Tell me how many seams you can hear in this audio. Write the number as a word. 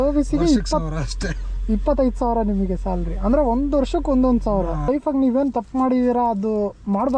one